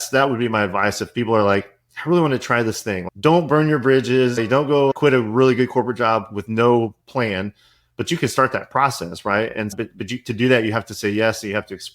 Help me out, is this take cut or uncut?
cut